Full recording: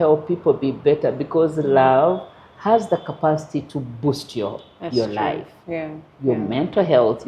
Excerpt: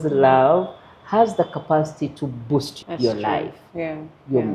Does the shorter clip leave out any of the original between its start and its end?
yes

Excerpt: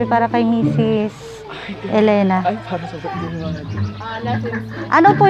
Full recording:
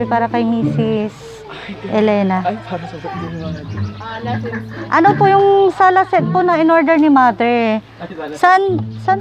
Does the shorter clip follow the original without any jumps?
yes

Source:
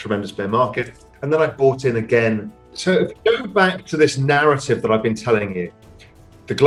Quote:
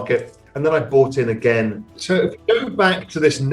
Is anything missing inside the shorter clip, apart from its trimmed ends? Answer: yes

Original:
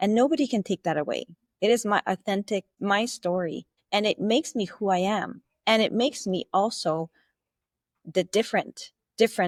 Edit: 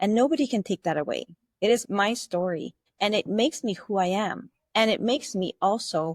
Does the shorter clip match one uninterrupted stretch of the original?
no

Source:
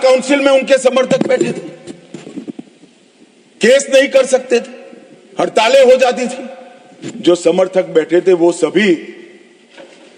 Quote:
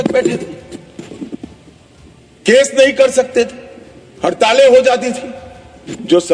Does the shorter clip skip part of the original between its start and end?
no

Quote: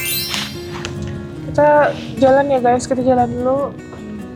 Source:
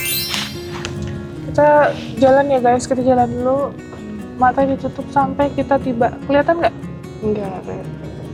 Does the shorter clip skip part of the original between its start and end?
no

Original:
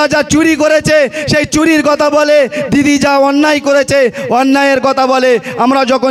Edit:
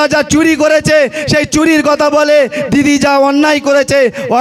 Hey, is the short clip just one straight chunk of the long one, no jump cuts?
yes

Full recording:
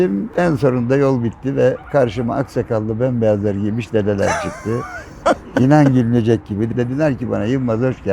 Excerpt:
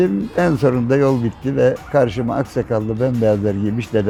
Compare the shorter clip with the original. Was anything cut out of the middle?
no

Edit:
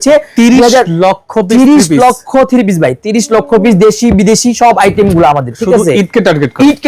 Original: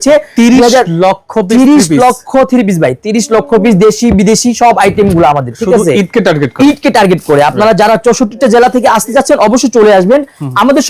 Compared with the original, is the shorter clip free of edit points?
yes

